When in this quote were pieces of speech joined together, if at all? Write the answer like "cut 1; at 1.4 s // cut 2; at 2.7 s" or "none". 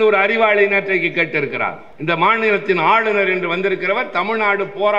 cut 1; at 1.9 s